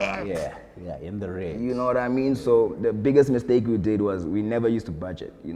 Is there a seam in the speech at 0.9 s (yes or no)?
no